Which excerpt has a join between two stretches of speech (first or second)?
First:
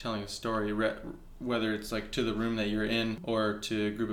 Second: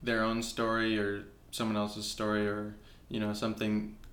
first